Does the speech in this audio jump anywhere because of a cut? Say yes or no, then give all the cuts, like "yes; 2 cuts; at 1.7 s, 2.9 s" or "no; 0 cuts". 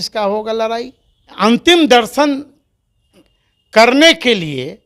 yes; 1 cut; at 1.3 s